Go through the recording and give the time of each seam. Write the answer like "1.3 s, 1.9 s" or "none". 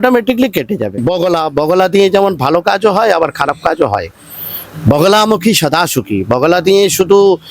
1.0 s